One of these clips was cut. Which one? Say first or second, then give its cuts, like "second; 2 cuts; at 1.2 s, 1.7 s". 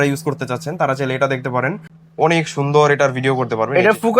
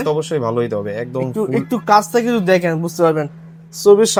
first; 1 cut; at 1.9 s